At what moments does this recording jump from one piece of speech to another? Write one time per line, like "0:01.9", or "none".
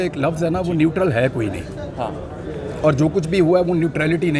none